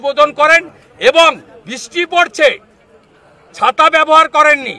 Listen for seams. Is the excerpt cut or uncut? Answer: uncut